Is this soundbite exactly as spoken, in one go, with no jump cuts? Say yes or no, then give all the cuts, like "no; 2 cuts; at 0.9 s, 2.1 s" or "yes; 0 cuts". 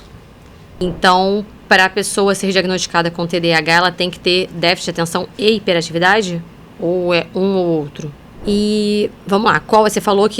no; 2 cuts; at 0.8 s, 8.3 s